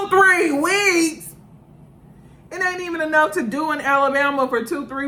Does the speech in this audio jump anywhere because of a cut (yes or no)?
no